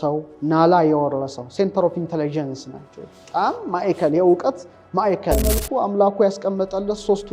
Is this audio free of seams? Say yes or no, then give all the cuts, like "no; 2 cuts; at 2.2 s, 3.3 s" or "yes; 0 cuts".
no; 1 cut; at 5.5 s